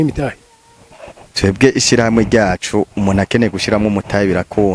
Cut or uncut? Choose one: uncut